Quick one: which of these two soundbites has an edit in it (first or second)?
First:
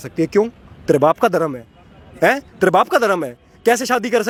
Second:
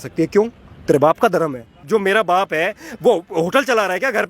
second